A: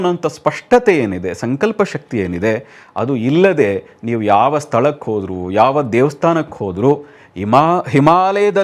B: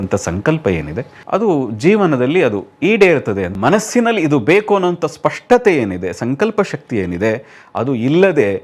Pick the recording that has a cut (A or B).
B